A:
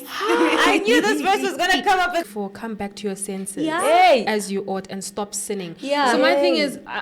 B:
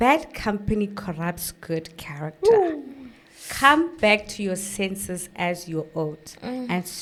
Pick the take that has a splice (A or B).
A